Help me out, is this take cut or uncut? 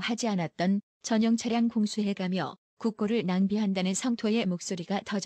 cut